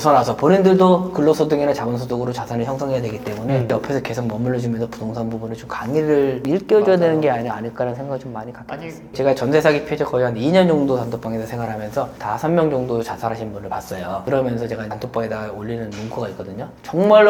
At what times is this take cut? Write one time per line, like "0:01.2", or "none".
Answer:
none